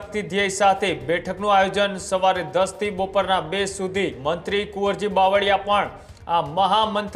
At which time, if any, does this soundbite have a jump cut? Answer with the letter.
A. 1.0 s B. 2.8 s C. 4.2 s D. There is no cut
C